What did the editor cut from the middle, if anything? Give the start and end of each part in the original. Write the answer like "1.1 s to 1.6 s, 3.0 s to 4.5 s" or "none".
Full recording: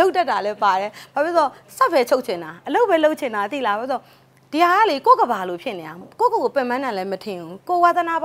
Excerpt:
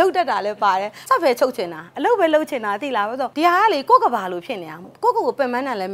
0.9 s to 1.6 s, 4.0 s to 4.5 s